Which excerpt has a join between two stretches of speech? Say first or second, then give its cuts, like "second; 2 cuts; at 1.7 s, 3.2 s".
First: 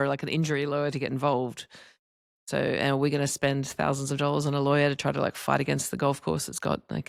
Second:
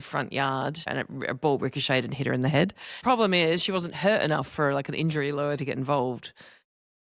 second; 2 cuts; at 0.9 s, 3.0 s